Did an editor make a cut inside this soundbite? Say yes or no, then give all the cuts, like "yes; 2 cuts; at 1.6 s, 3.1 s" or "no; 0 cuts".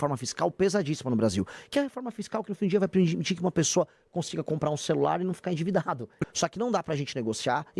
yes; 1 cut; at 6.2 s